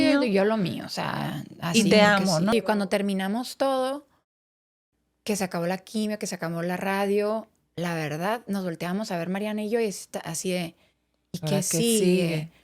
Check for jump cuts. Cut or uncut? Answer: cut